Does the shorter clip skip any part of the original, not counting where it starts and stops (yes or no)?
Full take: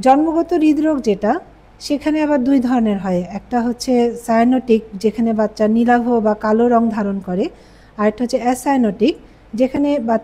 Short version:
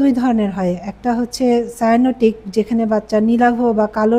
no